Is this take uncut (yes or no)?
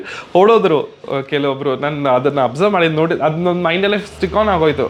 yes